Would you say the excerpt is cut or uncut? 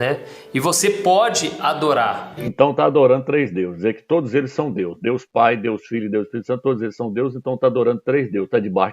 cut